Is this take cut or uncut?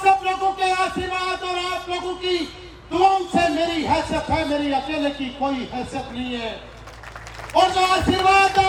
uncut